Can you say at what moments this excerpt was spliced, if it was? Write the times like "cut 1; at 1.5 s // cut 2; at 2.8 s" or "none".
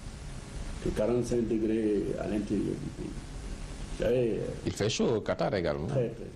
cut 1; at 2.8 s